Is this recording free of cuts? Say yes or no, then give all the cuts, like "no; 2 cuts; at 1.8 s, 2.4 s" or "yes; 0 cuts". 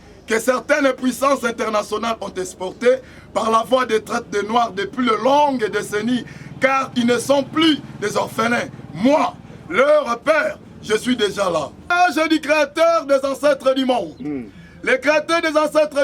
no; 1 cut; at 11.8 s